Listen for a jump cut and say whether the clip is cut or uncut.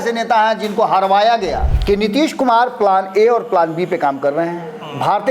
cut